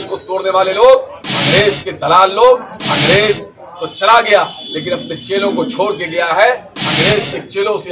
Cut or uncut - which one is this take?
cut